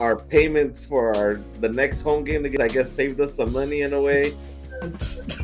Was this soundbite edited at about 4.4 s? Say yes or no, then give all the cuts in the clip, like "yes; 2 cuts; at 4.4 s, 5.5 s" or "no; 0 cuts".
no; 1 cut; at 2.6 s